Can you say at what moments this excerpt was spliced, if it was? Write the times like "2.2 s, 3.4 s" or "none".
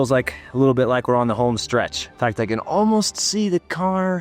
2.0 s